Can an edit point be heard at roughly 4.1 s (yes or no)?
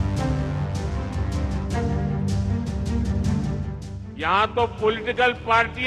no